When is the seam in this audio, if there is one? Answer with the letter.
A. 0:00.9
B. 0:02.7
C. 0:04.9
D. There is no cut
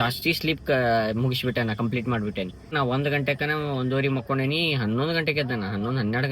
B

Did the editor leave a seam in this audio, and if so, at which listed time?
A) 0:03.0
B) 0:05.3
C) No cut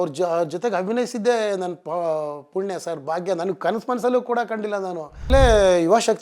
B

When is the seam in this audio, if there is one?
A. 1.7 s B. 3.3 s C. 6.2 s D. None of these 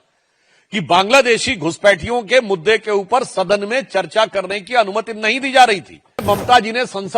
C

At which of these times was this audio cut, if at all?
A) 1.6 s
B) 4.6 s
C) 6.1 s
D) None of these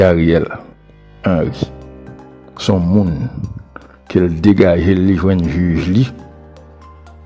C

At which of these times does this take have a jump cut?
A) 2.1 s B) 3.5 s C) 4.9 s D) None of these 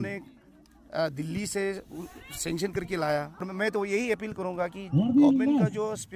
B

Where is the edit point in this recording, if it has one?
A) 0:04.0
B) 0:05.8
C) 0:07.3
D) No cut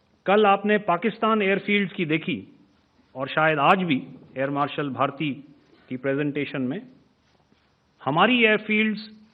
D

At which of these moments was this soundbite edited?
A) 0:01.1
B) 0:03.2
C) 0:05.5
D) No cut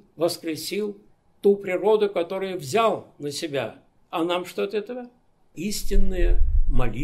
C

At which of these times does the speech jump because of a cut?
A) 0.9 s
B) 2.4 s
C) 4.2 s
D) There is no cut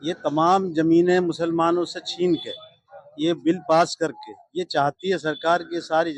D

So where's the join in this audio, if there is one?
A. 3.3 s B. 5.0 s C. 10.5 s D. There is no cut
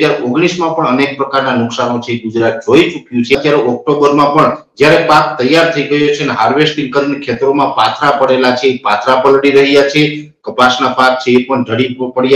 A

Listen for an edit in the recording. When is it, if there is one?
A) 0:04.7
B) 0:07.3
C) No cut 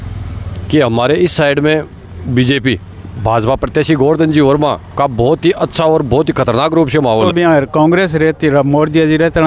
B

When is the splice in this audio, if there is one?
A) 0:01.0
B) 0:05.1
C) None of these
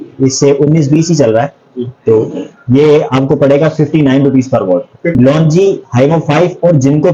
B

